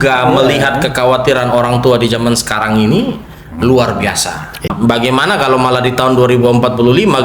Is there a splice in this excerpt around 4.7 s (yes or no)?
yes